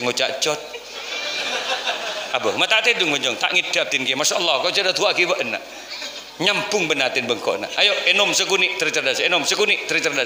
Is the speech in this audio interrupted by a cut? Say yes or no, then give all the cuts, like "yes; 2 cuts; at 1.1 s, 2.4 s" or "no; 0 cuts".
no; 0 cuts